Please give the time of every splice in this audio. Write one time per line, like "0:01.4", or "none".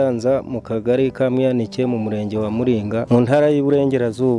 0:03.0